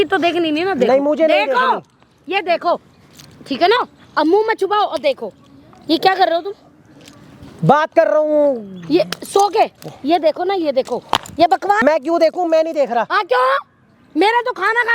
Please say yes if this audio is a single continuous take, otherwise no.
yes